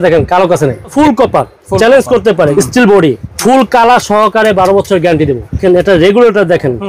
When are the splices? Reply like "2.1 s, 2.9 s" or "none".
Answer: 0.9 s, 2.5 s, 3.3 s, 5.6 s